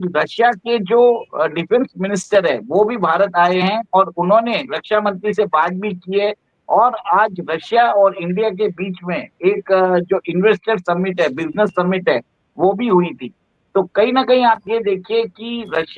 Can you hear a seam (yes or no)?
yes